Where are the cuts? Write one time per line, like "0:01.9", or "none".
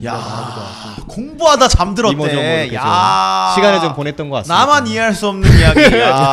none